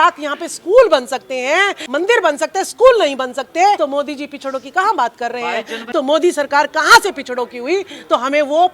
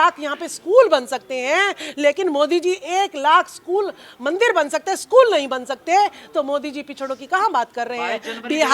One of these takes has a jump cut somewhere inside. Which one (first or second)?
first